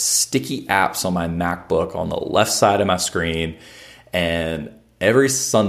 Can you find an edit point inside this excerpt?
no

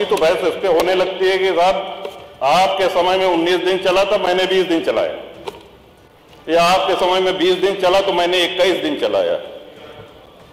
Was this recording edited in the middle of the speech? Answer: no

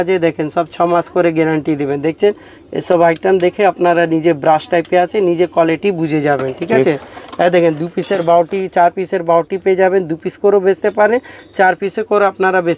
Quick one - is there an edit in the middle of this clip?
no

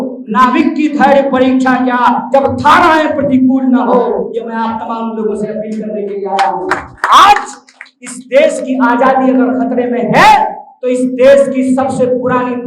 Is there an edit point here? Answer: no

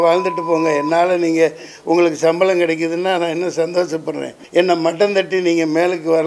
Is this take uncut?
no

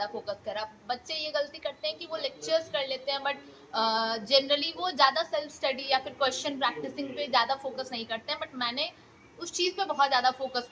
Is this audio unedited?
yes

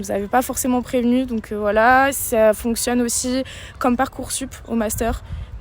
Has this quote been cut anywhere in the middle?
no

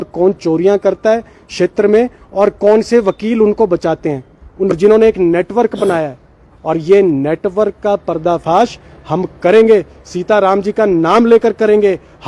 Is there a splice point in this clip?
no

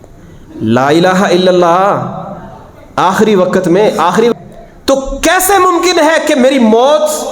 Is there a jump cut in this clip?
yes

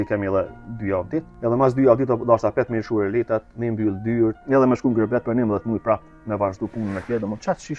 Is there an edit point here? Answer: yes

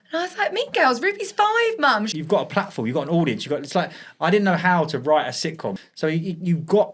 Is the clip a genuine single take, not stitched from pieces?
no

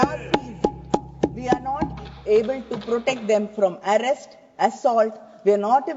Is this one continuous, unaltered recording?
yes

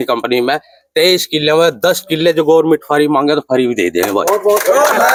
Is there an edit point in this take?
no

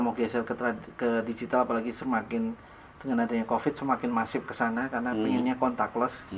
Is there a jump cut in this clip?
no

